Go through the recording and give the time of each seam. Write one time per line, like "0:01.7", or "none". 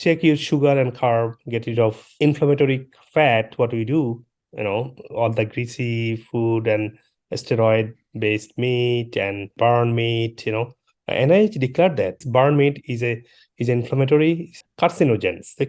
none